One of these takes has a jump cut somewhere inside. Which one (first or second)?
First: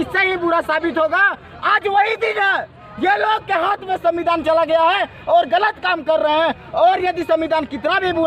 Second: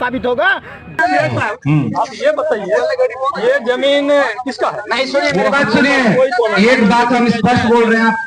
second